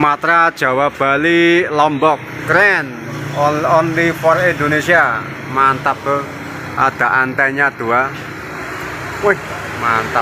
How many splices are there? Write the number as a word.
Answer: zero